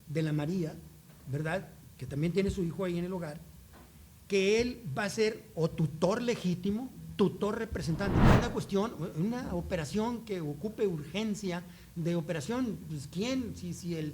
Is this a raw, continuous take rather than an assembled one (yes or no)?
no